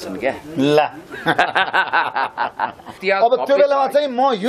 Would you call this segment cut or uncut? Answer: cut